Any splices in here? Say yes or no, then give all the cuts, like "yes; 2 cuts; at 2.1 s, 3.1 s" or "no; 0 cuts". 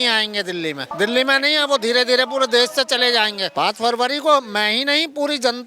yes; 2 cuts; at 0.9 s, 3.4 s